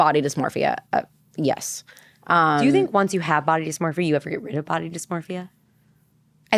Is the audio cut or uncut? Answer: uncut